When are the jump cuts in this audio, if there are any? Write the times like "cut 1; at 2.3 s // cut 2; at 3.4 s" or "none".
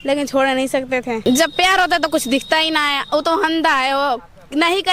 cut 1; at 1.2 s